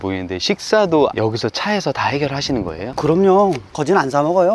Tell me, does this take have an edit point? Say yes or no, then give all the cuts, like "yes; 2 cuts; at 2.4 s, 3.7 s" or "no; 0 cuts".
no; 0 cuts